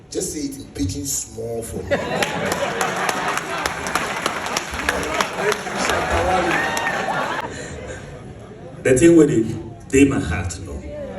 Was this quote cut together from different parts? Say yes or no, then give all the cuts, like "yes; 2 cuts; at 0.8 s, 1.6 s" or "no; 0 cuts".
yes; 1 cut; at 7.4 s